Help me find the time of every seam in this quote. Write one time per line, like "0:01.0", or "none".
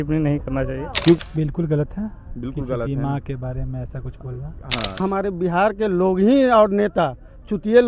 0:01.2
0:05.0